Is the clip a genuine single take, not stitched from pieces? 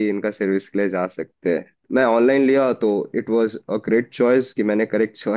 no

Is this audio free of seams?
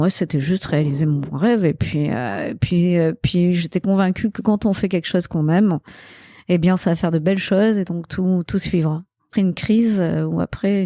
no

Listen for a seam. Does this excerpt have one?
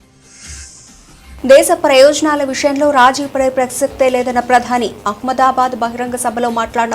yes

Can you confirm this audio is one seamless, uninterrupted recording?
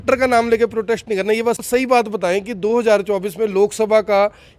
no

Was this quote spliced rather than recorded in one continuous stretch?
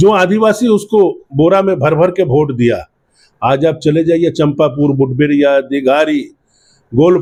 no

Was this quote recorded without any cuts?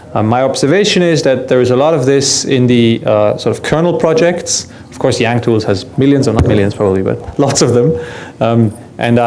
no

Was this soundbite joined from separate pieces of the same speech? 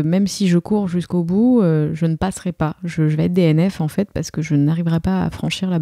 no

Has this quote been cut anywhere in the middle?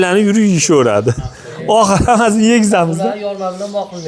no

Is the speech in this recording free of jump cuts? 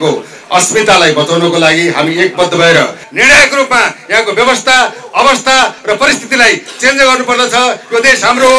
no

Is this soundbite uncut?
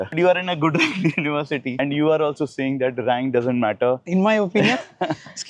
no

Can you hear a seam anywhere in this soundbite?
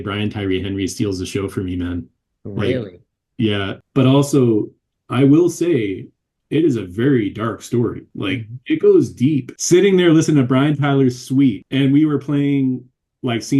yes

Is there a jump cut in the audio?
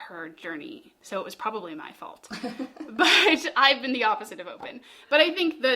yes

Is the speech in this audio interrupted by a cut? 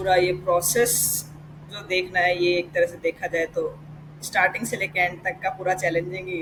no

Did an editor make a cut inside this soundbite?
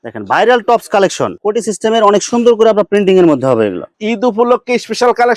yes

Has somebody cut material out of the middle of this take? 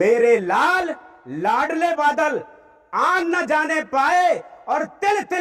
no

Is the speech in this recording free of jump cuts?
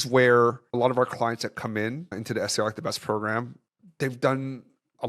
no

